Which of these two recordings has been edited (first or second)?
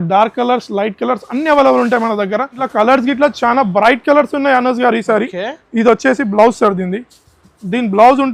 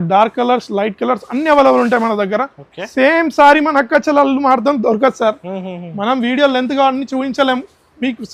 first